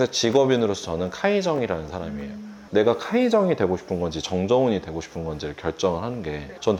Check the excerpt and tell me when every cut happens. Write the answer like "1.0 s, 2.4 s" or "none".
2.6 s